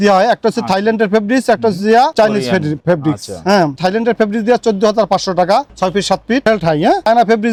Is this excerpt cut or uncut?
uncut